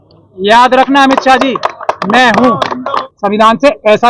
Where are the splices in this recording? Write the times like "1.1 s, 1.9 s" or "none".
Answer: 3.0 s